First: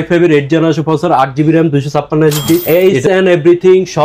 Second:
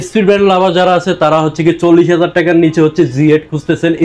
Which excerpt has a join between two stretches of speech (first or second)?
first